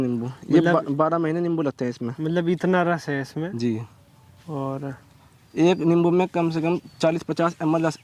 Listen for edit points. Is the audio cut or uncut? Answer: uncut